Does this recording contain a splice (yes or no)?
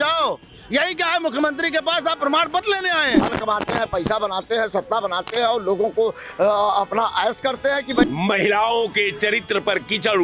yes